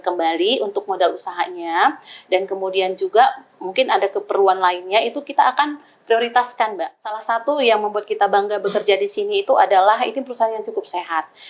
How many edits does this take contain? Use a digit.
1